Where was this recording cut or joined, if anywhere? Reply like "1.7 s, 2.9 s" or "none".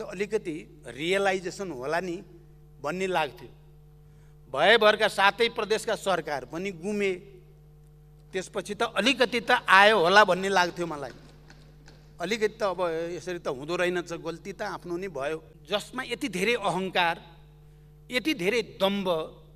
15.5 s